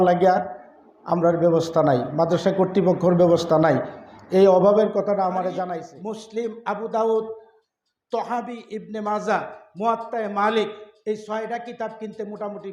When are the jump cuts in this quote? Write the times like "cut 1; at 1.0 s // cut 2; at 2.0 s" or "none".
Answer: cut 1; at 5.8 s